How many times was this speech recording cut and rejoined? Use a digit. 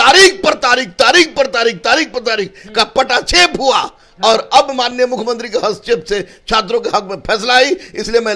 0